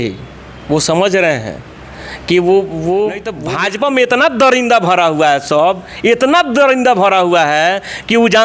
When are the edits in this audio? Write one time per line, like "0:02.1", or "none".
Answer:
0:03.3